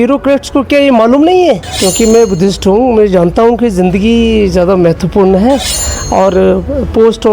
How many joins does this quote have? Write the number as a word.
one